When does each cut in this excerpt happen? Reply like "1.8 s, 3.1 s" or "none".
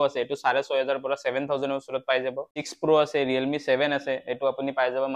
2.6 s